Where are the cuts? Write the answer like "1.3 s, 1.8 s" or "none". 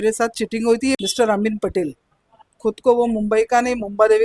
1.0 s